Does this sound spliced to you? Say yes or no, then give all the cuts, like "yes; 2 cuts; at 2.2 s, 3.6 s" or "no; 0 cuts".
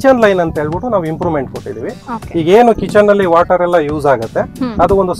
no; 0 cuts